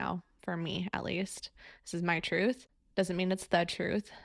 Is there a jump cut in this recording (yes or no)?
yes